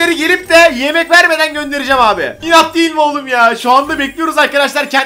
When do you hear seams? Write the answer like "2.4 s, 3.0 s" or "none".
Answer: none

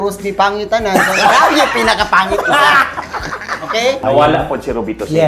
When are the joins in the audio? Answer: 4.0 s

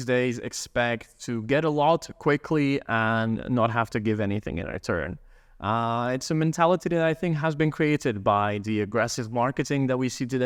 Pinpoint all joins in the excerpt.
none

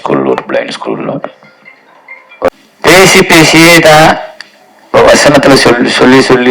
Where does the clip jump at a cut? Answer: 2.5 s

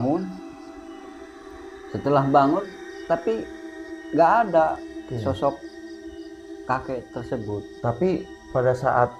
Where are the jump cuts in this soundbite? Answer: none

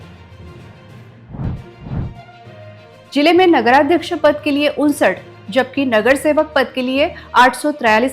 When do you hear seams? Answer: 1.1 s

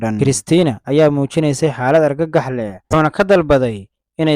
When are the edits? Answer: 2.9 s

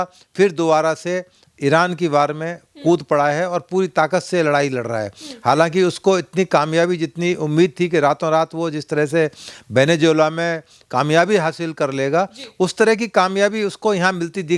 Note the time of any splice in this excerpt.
none

